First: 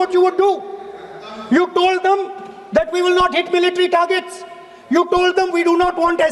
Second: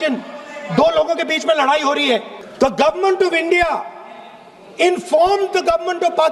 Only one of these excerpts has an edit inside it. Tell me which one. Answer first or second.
second